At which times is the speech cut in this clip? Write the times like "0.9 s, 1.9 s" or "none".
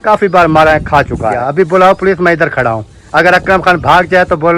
1.4 s